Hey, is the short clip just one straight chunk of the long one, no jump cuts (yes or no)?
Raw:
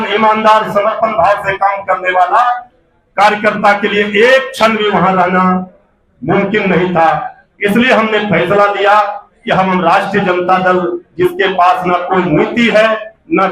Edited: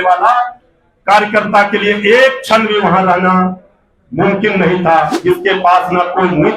no